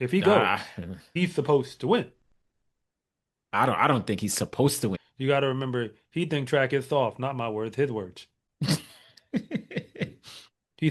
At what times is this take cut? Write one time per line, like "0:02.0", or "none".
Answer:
0:01.0
0:04.9